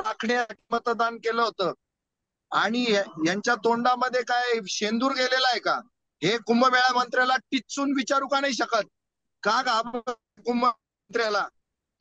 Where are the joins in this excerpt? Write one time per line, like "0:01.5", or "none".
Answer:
none